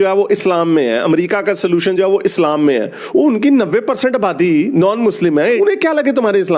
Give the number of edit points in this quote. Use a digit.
1